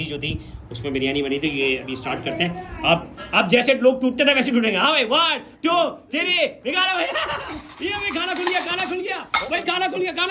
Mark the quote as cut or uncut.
uncut